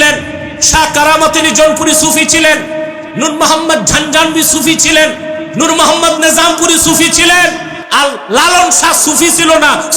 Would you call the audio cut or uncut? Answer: uncut